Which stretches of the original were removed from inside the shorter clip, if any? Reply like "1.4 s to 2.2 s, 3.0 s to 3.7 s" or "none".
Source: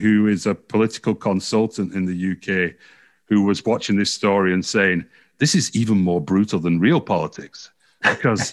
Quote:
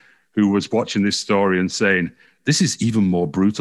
none